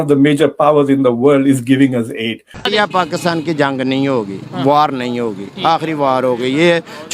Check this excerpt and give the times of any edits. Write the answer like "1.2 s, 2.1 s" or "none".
2.7 s